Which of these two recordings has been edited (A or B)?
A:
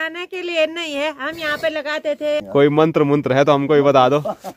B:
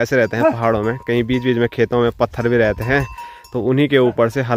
A